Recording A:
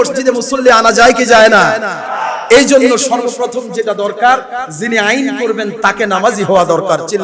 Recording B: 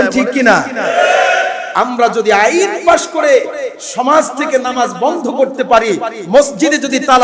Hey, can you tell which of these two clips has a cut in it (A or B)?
B